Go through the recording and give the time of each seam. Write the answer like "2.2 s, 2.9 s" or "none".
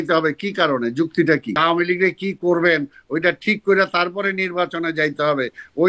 1.6 s